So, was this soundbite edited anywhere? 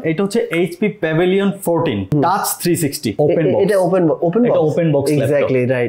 yes; 2 cuts; at 2.1 s, 3.2 s

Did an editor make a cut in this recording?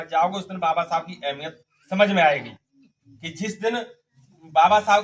no; 0 cuts

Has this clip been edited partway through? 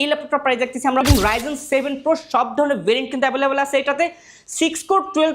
yes; 1 cut; at 1.0 s

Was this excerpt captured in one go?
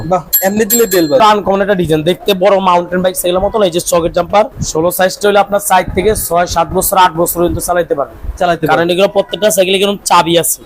no; 2 cuts; at 1.2 s, 4.6 s

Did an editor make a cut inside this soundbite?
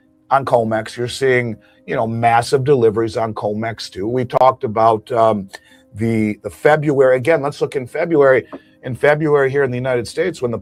no; 0 cuts

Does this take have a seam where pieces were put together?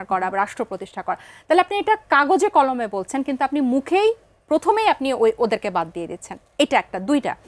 no; 0 cuts

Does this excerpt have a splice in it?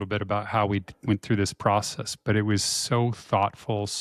no; 0 cuts

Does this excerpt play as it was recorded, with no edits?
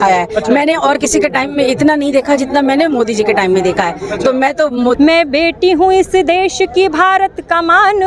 no; 1 cut; at 5.0 s

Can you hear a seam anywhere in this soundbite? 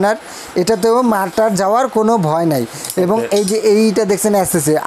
no; 0 cuts

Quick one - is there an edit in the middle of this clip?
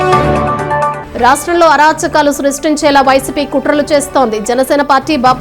yes; 1 cut; at 1.0 s

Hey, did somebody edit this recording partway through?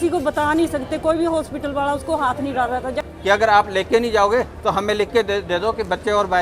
yes; 1 cut; at 3.0 s

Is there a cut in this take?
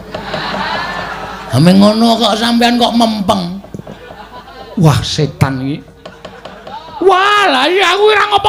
no; 0 cuts

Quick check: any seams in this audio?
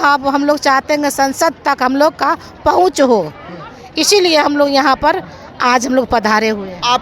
no; 0 cuts

